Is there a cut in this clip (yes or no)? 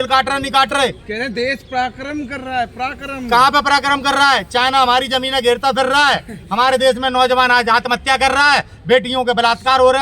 no